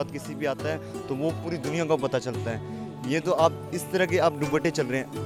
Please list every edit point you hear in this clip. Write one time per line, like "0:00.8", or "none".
none